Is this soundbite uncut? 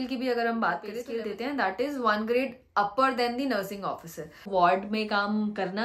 no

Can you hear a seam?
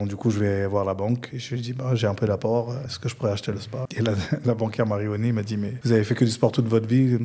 yes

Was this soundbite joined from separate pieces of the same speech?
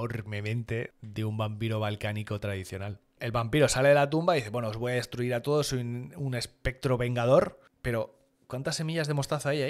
yes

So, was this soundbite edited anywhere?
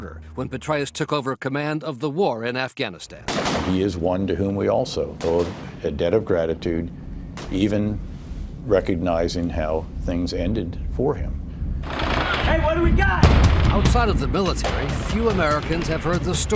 no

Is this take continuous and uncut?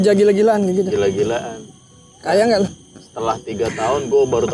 yes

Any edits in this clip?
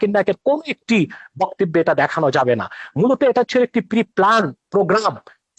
no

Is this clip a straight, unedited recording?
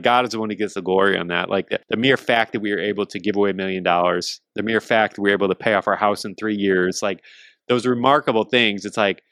no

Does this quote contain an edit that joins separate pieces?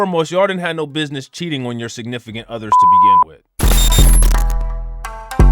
yes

